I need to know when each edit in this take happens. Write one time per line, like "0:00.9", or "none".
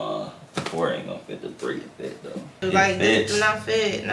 0:02.6